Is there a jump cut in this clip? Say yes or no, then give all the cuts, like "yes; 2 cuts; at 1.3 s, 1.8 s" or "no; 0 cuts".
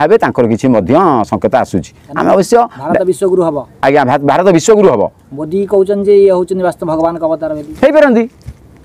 no; 0 cuts